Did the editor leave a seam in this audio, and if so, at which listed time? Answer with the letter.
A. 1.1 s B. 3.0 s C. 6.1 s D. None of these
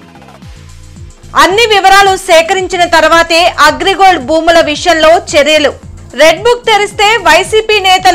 A